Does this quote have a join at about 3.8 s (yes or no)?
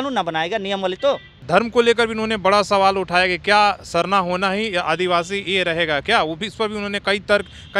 no